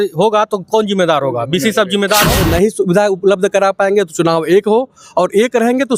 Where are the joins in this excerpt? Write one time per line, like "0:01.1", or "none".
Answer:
0:02.4